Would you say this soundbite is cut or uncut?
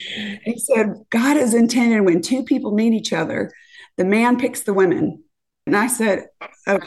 cut